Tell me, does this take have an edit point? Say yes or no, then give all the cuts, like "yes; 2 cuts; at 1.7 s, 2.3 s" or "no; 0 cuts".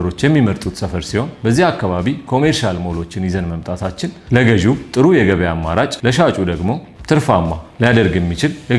yes; 3 cuts; at 1.3 s, 4.2 s, 5.9 s